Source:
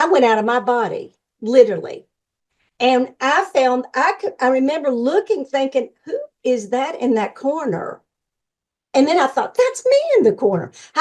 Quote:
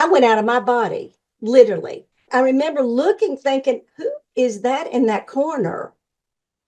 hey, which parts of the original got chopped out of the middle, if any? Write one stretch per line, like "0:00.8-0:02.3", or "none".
0:02.2-0:04.3